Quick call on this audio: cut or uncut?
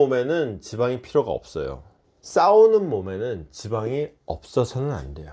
uncut